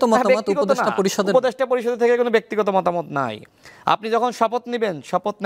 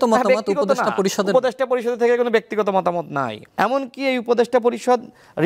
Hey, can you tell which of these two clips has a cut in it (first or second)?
second